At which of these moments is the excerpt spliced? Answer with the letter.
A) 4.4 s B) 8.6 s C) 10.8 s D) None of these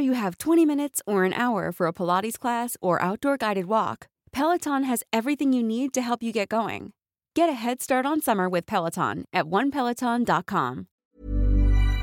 C